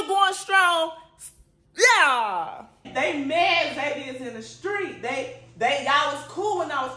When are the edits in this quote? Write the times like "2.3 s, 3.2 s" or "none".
2.9 s